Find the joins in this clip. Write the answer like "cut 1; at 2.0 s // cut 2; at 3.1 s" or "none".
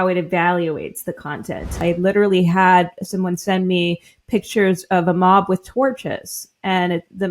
cut 1; at 1.8 s

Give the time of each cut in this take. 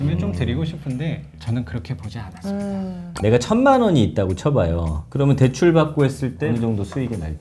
cut 1; at 1.3 s // cut 2; at 3.0 s // cut 3; at 6.4 s

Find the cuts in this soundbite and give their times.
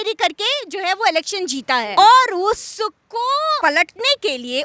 cut 1; at 1.9 s // cut 2; at 3.6 s

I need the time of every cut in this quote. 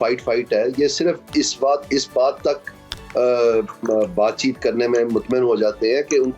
none

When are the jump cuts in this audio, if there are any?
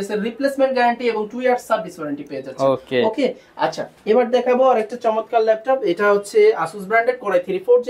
none

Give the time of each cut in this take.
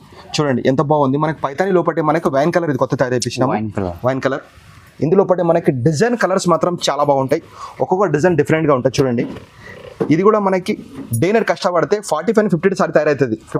none

